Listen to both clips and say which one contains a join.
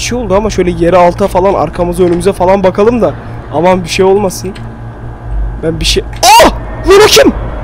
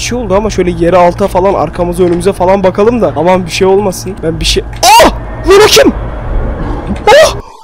second; 2 cuts; at 3.1 s, 4.1 s

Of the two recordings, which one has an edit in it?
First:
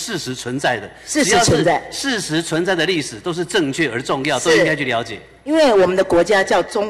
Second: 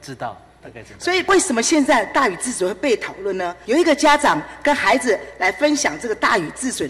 second; 2 cuts; at 1.3 s, 3.6 s

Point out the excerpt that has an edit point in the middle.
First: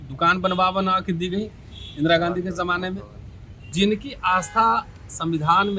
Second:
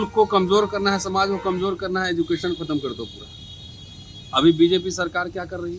first; 1 cut; at 3.7 s

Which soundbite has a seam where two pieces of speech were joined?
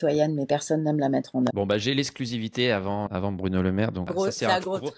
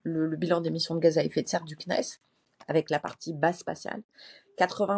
first; 3 cuts; at 1.5 s, 3.1 s, 4.1 s

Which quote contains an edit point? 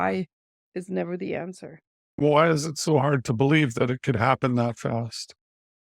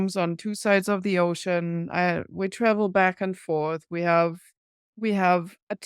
first; 1 cut; at 2.2 s

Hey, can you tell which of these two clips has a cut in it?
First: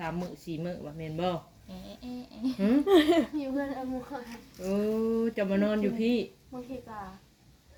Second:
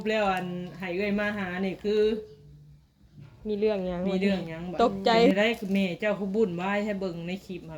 second; 1 cut; at 5.3 s

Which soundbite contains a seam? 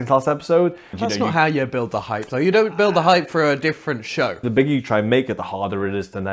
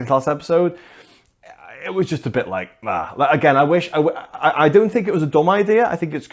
first; 2 cuts; at 0.9 s, 4.4 s

